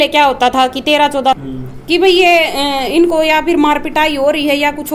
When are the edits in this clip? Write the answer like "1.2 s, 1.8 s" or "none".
1.4 s